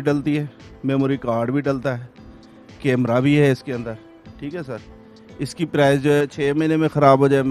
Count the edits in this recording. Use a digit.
1